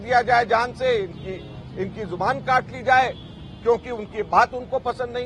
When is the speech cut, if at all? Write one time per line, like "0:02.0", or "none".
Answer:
none